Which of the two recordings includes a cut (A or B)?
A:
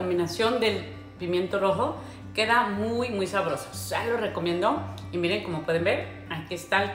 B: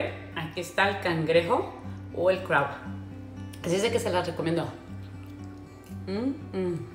B